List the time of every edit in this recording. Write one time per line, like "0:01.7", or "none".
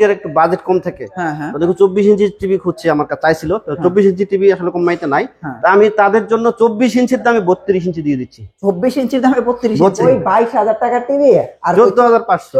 0:10.0